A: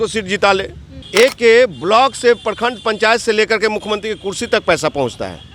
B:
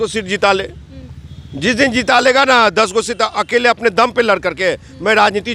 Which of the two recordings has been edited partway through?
A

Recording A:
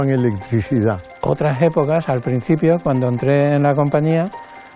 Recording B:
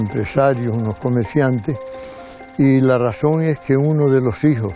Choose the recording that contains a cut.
A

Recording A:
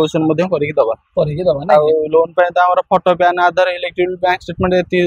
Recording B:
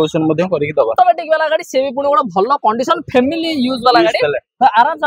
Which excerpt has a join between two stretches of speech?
B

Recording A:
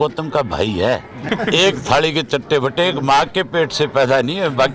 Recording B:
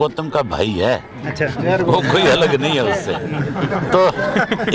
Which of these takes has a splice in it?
A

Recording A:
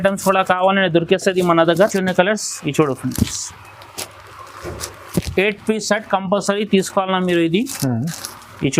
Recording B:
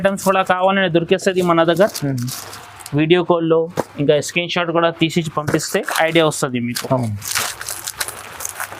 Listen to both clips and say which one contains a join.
A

